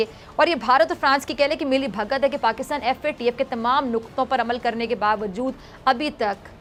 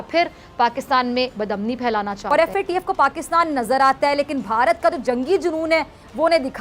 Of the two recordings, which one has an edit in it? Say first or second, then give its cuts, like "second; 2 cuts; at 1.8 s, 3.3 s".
second; 1 cut; at 2.2 s